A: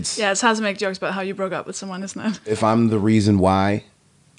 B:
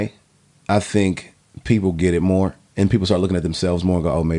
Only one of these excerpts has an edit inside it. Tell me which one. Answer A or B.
A